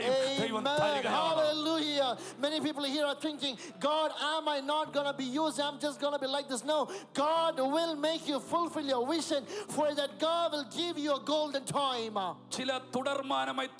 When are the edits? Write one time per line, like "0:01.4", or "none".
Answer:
0:12.5

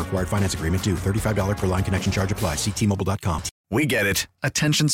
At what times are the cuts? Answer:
0:03.5

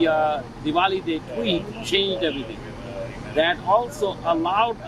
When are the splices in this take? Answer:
none

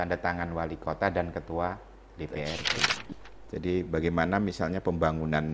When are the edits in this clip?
0:03.0

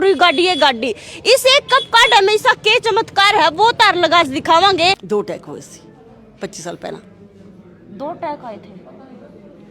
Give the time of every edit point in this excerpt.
0:05.0

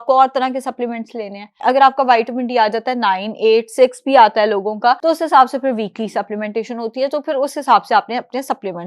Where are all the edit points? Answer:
0:01.5
0:05.0

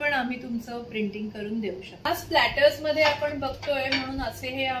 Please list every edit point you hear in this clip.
0:02.1

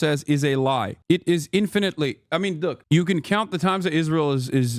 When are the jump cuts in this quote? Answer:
none

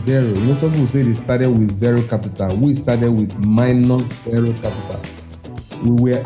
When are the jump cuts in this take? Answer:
none

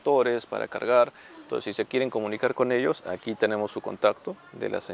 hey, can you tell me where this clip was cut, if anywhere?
none

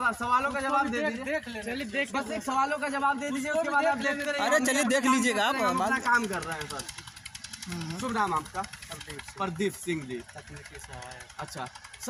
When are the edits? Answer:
none

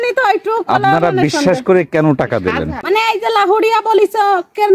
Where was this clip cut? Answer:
0:02.7

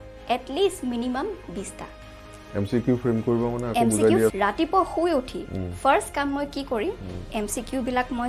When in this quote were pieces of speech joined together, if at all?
0:04.3

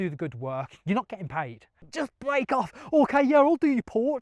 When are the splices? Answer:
0:01.8

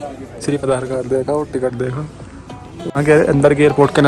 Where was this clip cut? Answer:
0:02.9

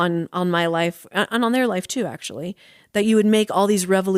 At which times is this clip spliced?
none

